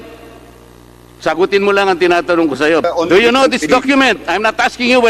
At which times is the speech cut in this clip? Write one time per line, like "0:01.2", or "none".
0:02.8